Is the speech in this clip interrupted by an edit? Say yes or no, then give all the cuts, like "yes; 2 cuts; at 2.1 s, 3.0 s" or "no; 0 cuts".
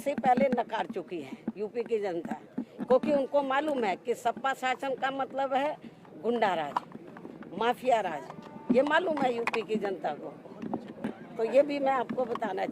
no; 0 cuts